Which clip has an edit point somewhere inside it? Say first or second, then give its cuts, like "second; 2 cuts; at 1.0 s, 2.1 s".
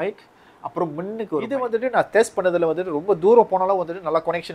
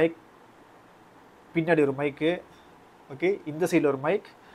first; 1 cut; at 1.5 s